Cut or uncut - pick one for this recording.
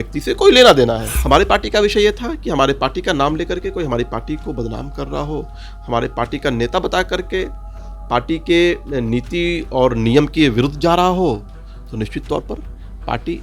cut